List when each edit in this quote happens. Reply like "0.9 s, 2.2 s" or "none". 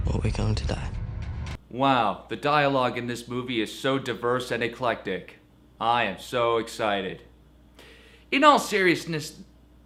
none

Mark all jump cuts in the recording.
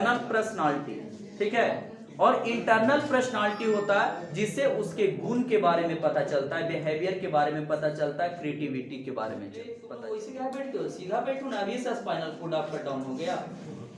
9.9 s

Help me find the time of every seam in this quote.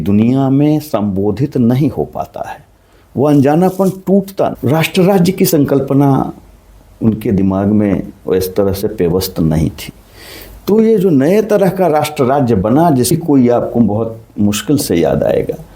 4.6 s, 13.1 s

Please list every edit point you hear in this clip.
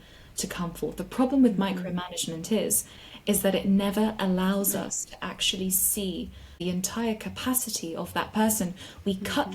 6.6 s

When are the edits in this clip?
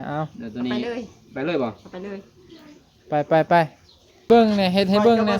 4.3 s

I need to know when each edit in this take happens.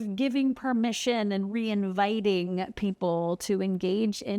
none

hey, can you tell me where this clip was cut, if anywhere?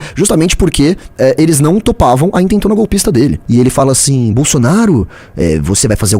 3.4 s

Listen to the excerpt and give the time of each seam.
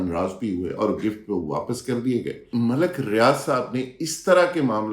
2.5 s

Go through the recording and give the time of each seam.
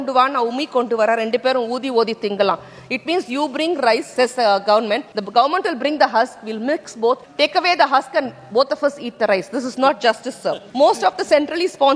4.1 s, 5.1 s, 7.3 s, 10.6 s

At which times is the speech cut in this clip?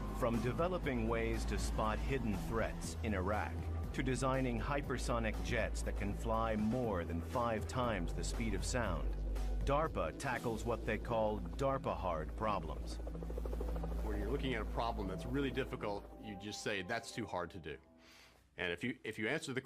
none

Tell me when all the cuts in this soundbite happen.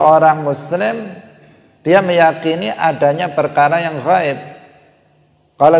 none

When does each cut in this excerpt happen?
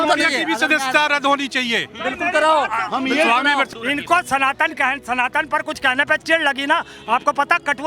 3.7 s

